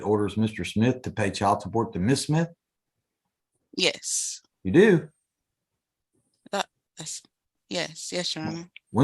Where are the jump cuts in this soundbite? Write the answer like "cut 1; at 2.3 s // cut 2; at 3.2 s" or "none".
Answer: none